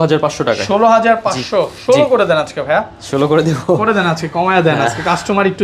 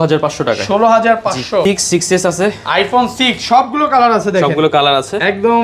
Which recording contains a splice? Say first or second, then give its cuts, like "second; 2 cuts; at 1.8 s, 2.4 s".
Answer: second; 1 cut; at 1.6 s